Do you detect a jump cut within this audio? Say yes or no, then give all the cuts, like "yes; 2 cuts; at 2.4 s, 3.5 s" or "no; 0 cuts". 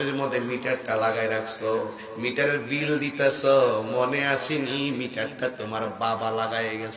no; 0 cuts